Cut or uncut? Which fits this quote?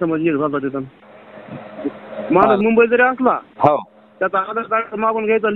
cut